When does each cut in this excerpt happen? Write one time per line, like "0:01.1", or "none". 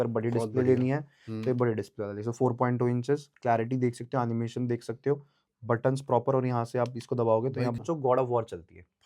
0:07.8